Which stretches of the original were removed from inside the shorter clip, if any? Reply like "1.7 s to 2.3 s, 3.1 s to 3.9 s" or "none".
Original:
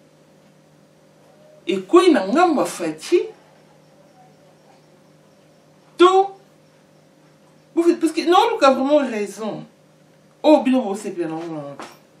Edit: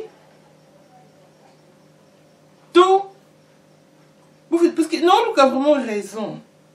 none